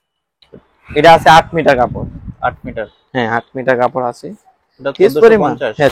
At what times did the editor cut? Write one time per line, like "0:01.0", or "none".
none